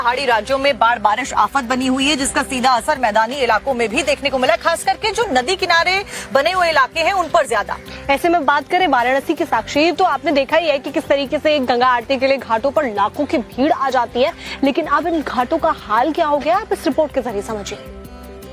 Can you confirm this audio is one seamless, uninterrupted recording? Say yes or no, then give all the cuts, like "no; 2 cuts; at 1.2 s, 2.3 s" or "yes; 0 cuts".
yes; 0 cuts